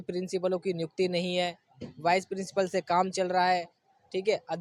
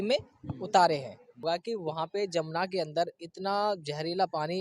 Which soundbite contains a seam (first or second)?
second